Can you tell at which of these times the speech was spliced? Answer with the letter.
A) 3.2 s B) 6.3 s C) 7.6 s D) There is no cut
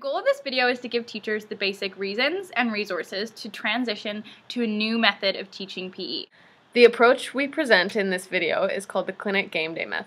B